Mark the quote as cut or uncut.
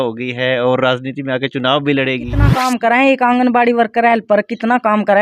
cut